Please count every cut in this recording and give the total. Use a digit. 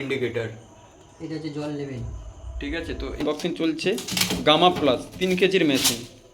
1